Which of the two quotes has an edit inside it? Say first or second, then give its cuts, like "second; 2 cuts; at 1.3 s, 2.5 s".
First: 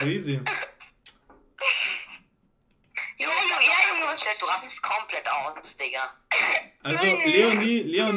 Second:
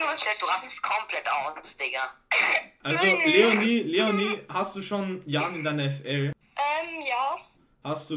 second; 1 cut; at 6.4 s